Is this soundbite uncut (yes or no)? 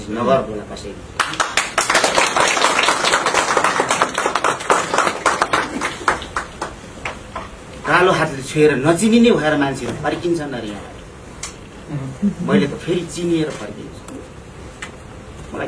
yes